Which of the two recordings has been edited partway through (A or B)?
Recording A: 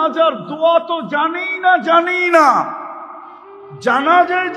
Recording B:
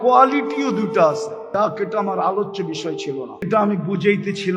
B